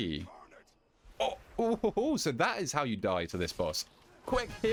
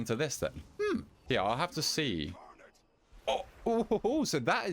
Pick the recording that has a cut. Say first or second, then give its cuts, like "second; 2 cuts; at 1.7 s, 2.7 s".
second; 1 cut; at 1.1 s